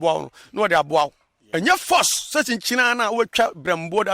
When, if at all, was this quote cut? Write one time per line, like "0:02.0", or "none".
none